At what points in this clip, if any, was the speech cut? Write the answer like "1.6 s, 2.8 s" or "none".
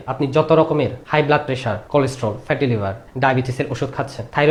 none